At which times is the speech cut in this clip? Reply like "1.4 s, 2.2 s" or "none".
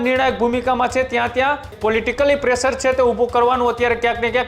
1.8 s